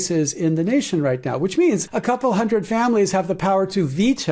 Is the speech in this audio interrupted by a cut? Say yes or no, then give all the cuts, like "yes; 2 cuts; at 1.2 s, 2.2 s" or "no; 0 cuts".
yes; 1 cut; at 1.9 s